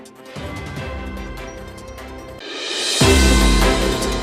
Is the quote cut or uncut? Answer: cut